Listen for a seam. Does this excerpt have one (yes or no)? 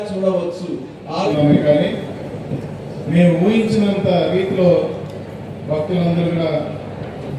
yes